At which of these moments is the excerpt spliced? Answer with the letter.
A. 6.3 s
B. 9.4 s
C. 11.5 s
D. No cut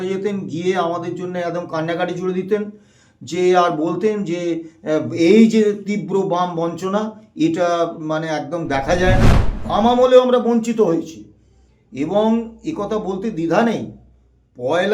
B